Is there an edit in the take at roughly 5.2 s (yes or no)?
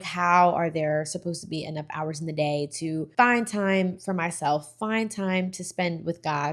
no